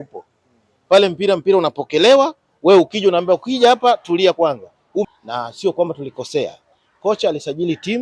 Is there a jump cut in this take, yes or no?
yes